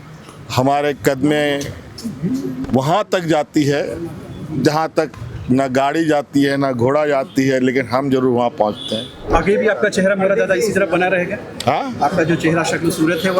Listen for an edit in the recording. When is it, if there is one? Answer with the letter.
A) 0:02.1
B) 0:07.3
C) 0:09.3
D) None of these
C